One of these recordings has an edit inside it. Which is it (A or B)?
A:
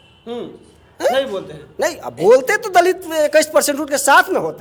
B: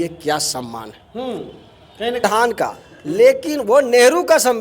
B